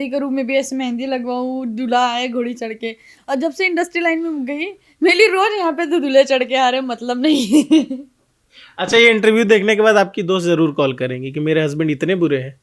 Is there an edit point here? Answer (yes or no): no